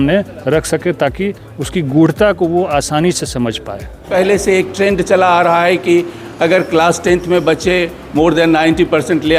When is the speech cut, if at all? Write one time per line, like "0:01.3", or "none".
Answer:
0:04.1